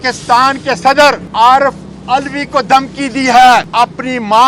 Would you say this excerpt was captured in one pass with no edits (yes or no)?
no